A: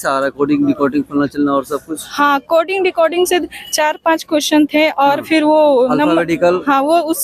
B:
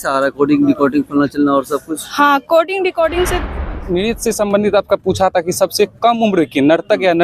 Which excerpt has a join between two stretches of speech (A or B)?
B